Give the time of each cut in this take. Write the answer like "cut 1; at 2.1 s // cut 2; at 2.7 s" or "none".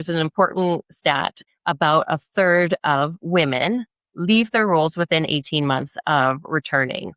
cut 1; at 1.5 s

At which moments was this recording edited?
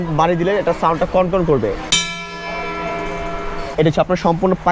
cut 1; at 3.7 s

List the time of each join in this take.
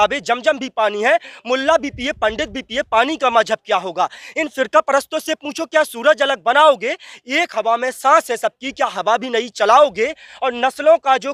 none

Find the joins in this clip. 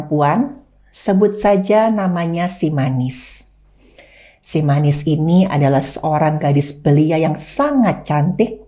none

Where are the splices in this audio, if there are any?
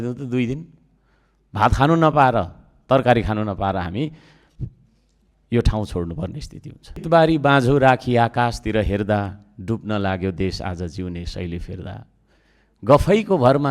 cut 1; at 7.0 s

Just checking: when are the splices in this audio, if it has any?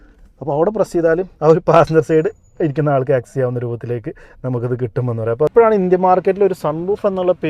cut 1; at 5.5 s

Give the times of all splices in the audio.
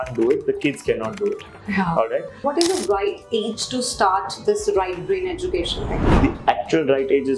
cut 1; at 2.4 s // cut 2; at 6.0 s

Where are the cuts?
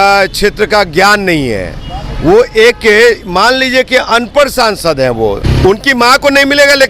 cut 1; at 5.5 s

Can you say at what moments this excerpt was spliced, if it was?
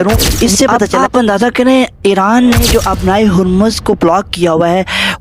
cut 1; at 1.0 s

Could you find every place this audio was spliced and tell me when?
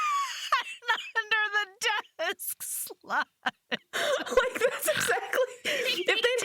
none

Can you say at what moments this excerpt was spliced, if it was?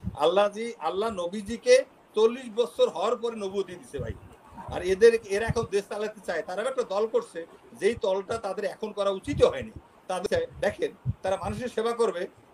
cut 1; at 10.2 s

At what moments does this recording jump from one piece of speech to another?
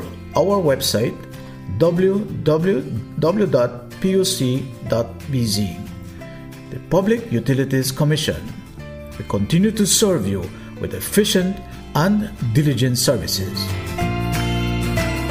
none

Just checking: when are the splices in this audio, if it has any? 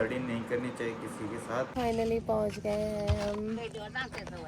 cut 1; at 1.7 s

